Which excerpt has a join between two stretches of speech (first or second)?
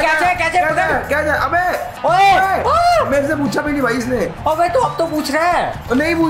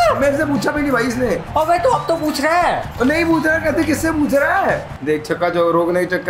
second